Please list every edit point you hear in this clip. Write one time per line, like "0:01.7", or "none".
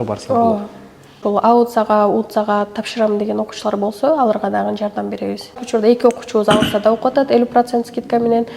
0:01.2
0:05.6